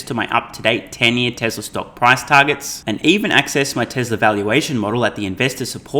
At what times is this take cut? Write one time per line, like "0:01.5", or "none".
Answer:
none